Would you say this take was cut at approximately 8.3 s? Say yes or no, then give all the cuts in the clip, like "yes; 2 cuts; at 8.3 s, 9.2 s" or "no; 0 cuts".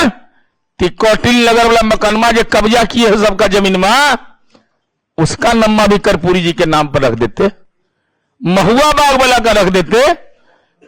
no; 0 cuts